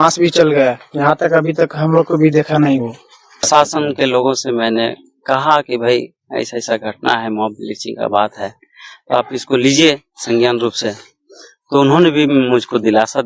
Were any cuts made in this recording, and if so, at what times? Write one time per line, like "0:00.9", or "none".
0:03.5